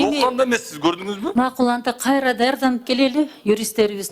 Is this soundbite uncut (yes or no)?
no